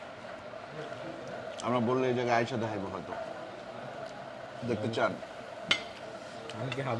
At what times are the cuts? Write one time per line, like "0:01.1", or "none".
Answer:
none